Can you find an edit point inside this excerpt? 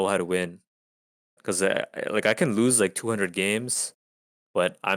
yes; 1 cut; at 1.4 s

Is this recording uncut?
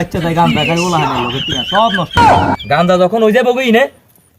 no; 1 cut; at 2.2 s

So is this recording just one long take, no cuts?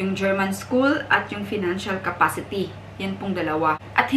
yes; 0 cuts

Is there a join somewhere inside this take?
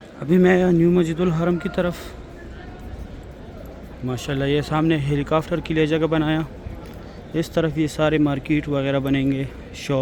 no; 0 cuts

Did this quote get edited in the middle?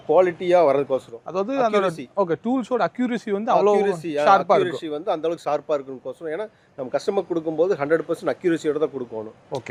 no; 0 cuts

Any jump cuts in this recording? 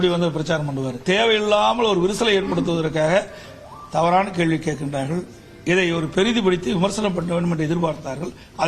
yes; 1 cut; at 1.0 s

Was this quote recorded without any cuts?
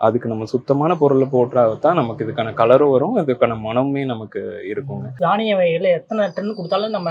no; 1 cut; at 5.2 s

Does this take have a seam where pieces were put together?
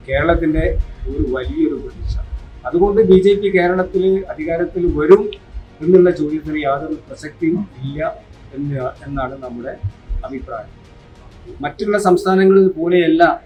no; 0 cuts

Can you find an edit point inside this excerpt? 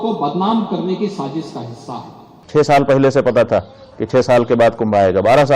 yes; 1 cut; at 2.4 s

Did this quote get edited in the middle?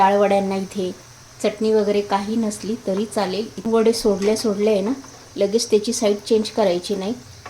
yes; 2 cuts; at 1.6 s, 3.7 s

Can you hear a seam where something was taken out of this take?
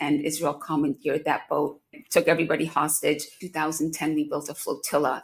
yes; 2 cuts; at 2.0 s, 3.4 s

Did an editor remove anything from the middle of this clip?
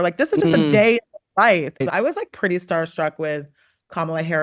yes; 1 cut; at 1.8 s

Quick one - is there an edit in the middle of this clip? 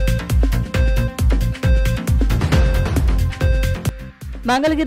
no; 0 cuts

